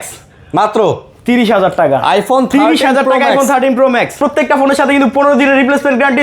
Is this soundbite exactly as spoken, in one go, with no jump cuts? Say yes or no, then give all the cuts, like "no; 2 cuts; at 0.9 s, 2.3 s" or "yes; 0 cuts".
no; 1 cut; at 4.2 s